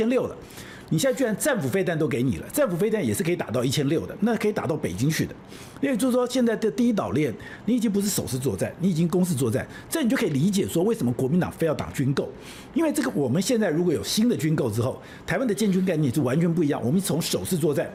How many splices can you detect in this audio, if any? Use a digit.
0